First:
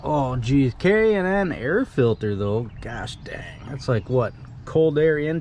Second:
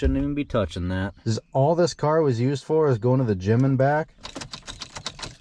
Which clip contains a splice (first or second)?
second